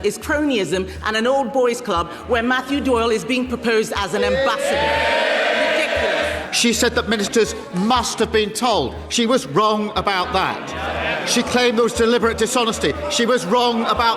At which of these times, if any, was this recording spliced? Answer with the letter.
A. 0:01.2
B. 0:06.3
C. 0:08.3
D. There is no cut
B